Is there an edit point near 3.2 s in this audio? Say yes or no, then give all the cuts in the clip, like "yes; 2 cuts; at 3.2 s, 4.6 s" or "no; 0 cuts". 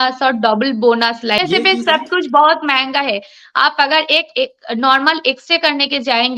no; 1 cut; at 1.4 s